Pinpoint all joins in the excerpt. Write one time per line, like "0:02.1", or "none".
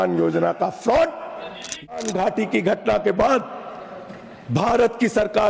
0:01.9